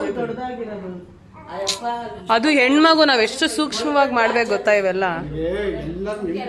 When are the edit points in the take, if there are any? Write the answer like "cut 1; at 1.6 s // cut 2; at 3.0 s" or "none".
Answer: none